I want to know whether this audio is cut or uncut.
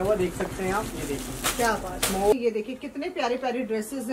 cut